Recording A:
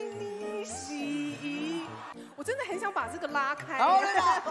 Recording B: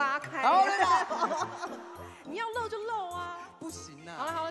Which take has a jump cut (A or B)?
A